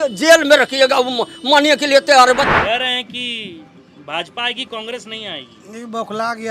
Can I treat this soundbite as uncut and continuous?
no; 1 cut; at 2.5 s

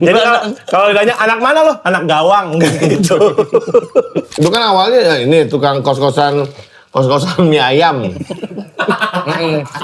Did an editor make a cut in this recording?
yes; 1 cut; at 4.3 s

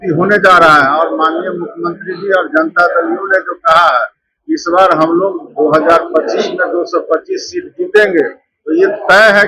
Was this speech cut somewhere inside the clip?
no; 0 cuts

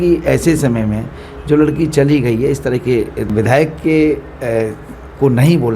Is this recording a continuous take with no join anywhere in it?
no; 1 cut; at 3.3 s

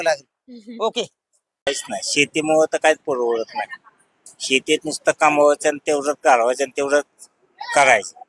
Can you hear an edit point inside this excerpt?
yes; 1 cut; at 1.7 s

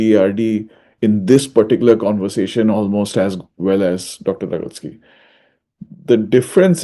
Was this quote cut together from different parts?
no; 0 cuts

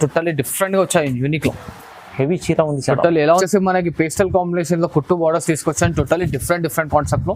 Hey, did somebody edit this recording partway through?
yes; 1 cut; at 3.4 s

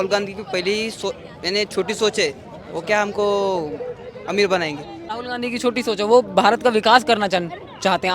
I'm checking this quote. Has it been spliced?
yes; 1 cut; at 5.0 s

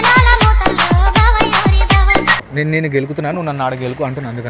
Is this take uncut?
no; 1 cut; at 2.4 s

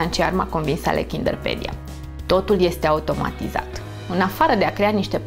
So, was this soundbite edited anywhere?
no; 0 cuts

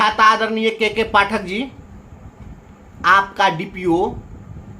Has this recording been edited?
no; 0 cuts

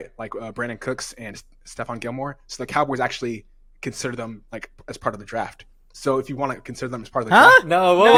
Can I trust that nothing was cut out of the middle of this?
yes; 0 cuts

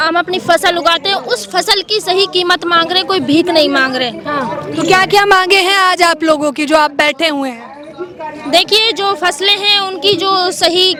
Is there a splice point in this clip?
no; 0 cuts

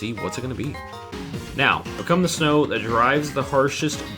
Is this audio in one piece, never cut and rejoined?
no; 1 cut; at 1.1 s

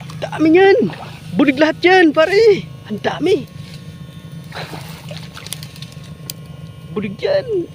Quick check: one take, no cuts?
yes; 0 cuts

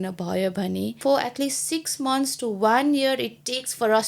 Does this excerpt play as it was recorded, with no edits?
no; 1 cut; at 1.0 s

